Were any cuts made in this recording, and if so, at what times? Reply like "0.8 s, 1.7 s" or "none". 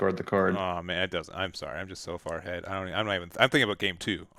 none